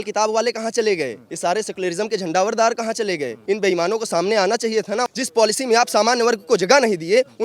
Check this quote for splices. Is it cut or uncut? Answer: cut